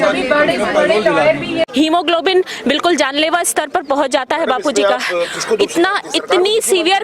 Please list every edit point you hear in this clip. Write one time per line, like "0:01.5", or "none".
0:01.7

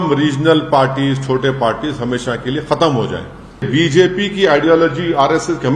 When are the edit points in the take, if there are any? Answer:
0:03.7

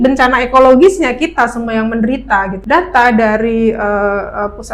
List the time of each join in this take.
0:02.6

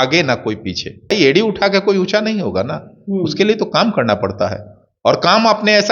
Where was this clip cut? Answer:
0:01.1

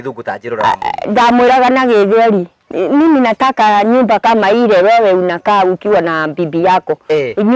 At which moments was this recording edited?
0:02.6

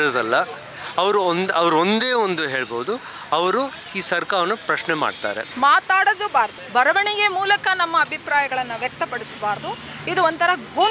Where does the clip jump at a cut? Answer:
0:05.5
0:06.6

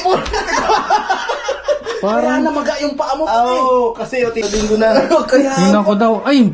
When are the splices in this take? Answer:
0:04.4

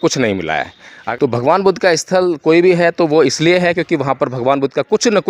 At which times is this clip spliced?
0:01.0

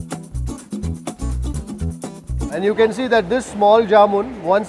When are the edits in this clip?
0:02.5

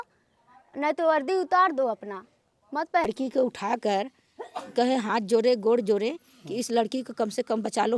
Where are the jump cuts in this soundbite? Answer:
0:03.0

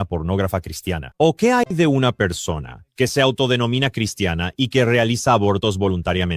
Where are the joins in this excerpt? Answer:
0:01.7

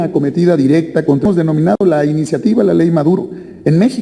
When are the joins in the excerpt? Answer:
0:01.3

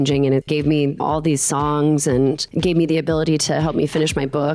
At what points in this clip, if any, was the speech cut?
0:00.9

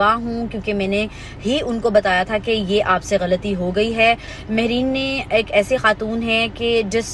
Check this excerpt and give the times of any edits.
0:04.3

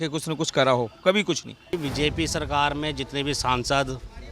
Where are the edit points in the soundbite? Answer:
0:01.6

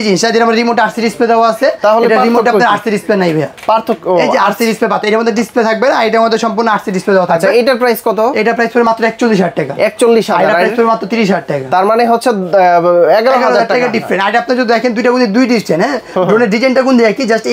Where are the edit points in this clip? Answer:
none

